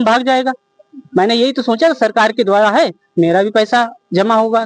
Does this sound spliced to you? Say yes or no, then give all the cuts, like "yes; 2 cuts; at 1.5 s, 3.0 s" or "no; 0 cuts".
no; 0 cuts